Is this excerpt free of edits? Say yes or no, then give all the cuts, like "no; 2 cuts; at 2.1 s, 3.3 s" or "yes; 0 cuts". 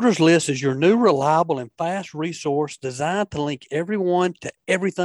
yes; 0 cuts